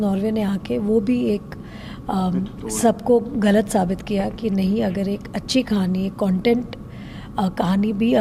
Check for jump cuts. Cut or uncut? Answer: uncut